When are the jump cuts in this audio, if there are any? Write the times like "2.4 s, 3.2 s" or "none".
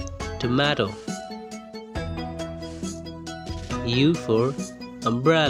none